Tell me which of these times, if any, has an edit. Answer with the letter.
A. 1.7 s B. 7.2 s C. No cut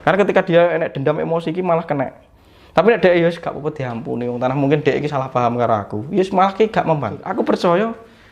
B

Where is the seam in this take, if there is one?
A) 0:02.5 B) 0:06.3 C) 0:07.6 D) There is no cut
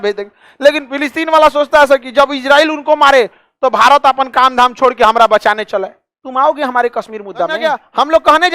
C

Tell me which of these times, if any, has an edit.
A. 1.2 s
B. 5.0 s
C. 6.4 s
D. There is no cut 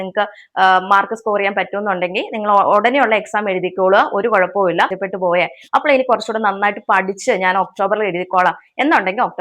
B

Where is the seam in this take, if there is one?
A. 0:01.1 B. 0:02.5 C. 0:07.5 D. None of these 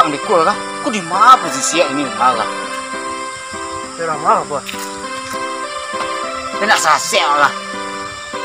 C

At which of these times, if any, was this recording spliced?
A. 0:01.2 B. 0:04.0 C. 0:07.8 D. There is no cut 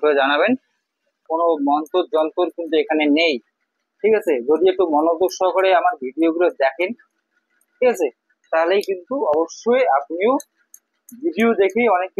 A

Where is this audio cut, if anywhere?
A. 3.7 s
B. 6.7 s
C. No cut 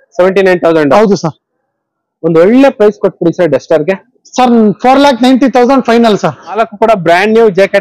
B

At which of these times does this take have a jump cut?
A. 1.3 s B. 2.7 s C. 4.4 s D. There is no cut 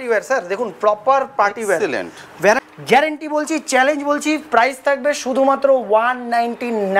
B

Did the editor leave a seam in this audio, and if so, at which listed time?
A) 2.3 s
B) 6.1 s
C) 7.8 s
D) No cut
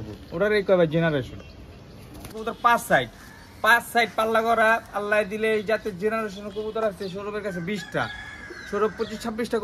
A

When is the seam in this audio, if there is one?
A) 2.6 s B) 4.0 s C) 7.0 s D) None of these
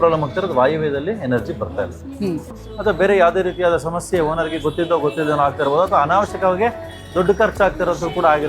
A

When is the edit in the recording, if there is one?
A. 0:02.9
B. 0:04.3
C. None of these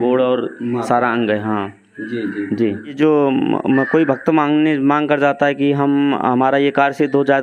A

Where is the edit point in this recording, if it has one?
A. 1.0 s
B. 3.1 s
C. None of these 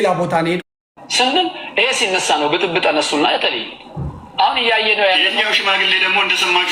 A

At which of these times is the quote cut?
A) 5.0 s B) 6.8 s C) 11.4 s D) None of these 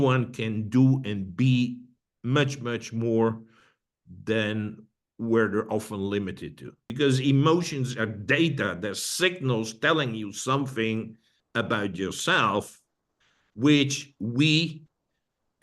B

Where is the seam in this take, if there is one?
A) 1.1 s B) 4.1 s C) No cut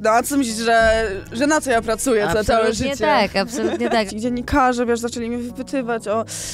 B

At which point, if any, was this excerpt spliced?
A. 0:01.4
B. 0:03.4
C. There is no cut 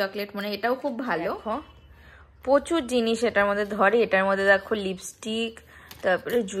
A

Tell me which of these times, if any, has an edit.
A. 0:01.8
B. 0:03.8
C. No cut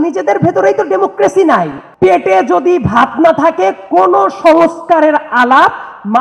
A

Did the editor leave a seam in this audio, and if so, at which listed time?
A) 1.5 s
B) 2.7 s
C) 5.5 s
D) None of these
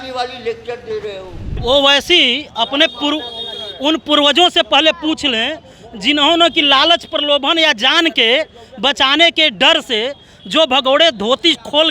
A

